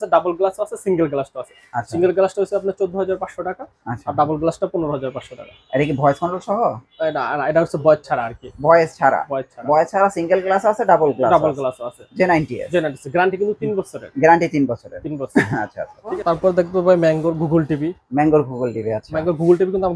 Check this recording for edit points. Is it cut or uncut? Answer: uncut